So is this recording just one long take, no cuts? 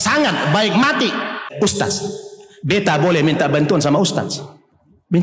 no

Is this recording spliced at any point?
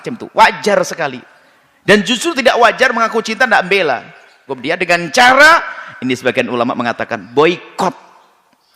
yes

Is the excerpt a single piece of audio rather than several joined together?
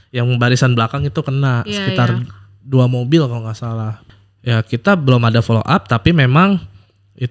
no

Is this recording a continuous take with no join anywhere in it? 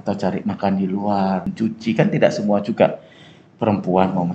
no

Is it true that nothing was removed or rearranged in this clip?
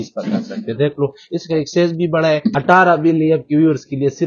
no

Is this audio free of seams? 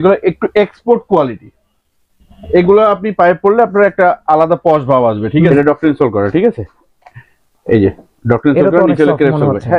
no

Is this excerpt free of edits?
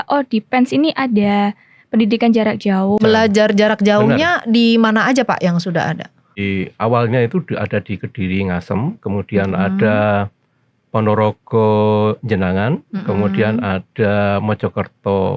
no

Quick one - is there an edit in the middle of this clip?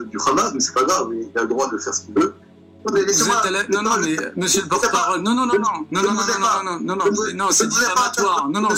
yes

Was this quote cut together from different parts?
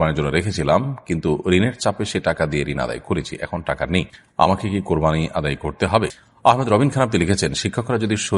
yes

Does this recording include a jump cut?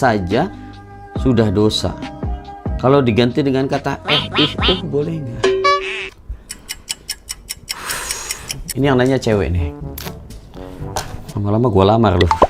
no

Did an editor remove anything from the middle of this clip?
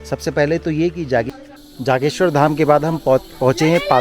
yes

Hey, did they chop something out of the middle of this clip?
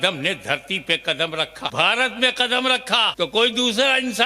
yes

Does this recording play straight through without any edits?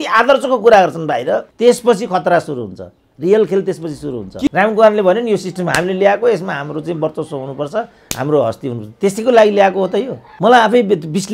no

